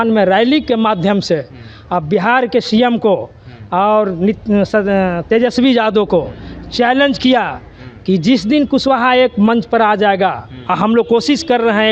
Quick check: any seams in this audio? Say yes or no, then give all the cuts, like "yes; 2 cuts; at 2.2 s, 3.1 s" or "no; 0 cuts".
no; 0 cuts